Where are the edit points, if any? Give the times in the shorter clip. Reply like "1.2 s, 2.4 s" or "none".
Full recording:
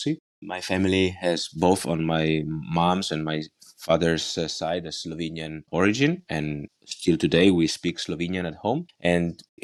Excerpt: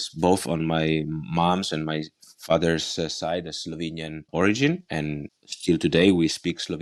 none